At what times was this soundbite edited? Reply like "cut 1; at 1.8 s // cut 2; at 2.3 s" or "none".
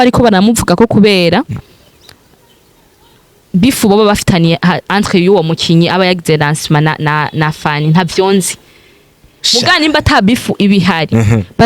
none